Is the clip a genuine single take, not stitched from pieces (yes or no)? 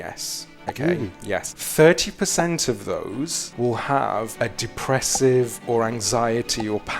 no